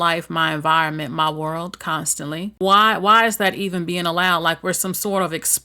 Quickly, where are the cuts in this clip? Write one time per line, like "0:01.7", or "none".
0:02.5